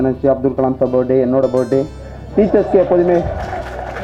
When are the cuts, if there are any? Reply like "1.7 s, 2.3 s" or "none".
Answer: none